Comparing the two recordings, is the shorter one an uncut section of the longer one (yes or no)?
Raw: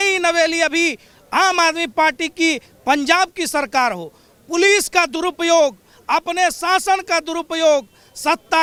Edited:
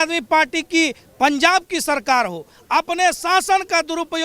no